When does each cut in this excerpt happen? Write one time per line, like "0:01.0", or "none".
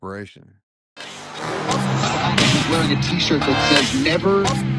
0:01.3